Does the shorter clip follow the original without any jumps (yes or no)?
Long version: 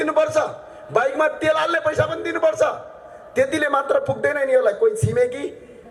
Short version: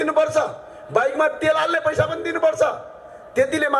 yes